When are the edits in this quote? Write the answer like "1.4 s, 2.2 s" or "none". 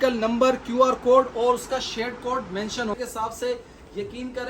2.9 s